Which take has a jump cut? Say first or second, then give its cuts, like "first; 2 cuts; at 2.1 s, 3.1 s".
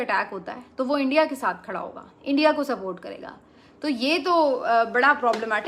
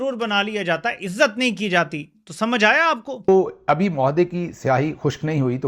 second; 1 cut; at 3.3 s